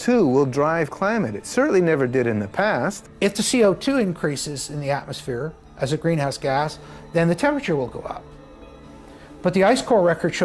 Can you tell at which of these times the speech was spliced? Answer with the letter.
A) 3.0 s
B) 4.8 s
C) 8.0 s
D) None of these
A